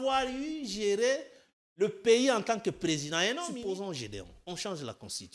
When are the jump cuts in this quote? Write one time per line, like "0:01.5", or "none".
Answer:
0:03.5